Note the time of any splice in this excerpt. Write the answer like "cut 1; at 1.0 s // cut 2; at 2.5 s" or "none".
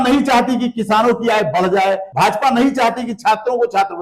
cut 1; at 2.1 s